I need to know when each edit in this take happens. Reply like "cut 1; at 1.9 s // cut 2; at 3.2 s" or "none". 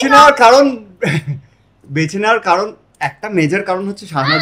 none

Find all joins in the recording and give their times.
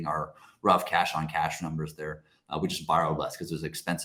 none

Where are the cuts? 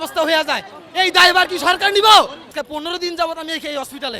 cut 1; at 2.5 s

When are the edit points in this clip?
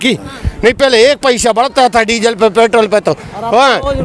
none

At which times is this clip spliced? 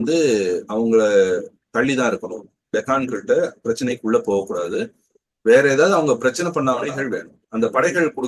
cut 1; at 7.0 s

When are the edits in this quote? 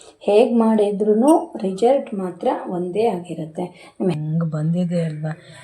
cut 1; at 4.2 s

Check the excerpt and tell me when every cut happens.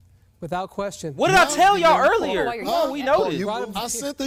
none

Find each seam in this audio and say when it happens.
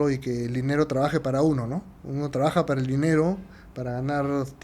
none

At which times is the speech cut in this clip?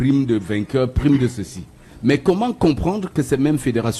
none

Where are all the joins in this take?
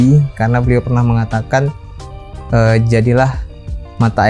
none

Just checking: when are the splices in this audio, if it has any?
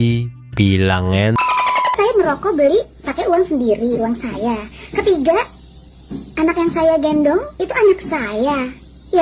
cut 1; at 1.9 s

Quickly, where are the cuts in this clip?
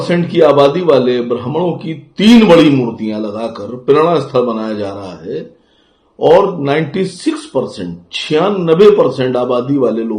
none

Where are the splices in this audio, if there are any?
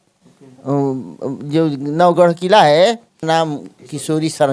cut 1; at 3.2 s

